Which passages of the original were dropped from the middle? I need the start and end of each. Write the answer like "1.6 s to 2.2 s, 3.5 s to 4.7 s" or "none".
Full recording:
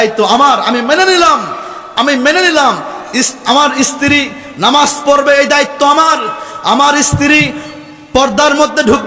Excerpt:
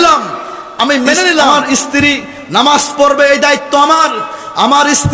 2.7 s to 3.6 s